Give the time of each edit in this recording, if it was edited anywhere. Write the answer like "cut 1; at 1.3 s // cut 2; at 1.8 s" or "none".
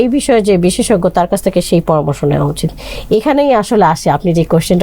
none